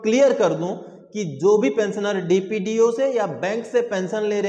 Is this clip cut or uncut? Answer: uncut